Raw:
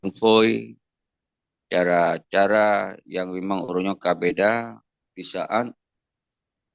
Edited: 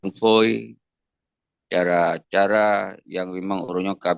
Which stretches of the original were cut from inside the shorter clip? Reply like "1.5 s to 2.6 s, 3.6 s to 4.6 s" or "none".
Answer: none